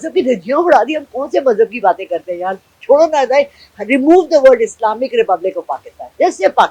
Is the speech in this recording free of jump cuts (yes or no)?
yes